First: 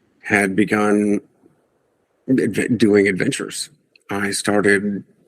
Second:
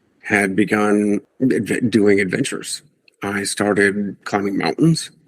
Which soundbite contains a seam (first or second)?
second